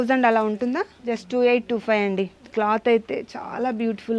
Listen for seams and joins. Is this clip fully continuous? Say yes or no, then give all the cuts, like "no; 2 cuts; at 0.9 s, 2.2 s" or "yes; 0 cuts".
yes; 0 cuts